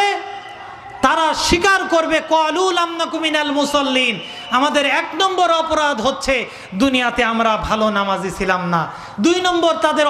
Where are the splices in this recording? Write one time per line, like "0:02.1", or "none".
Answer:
none